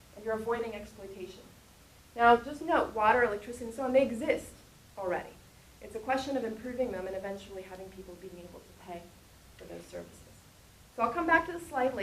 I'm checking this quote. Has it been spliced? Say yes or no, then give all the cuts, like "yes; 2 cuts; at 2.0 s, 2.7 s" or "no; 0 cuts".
yes; 1 cut; at 9.0 s